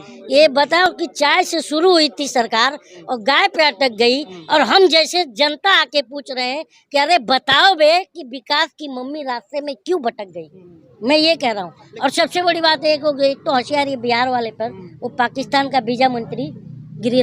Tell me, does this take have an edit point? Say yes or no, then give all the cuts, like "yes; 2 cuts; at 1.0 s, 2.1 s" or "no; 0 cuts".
no; 0 cuts